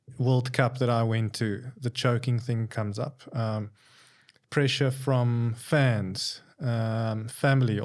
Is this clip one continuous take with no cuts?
yes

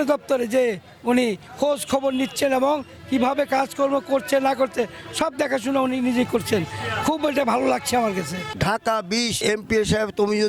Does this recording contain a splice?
yes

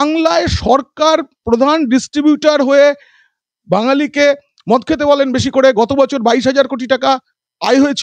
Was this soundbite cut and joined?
no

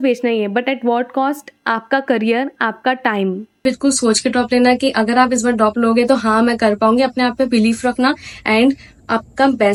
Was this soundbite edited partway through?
no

